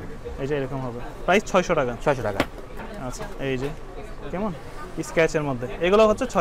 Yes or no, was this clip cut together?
no